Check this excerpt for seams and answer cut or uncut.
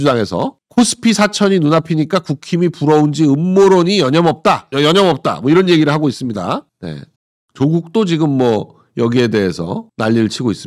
uncut